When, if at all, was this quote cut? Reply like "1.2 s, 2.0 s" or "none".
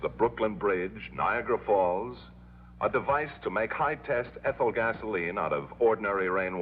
1.1 s